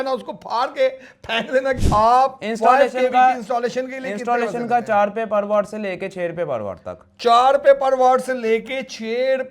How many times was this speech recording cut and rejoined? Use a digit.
1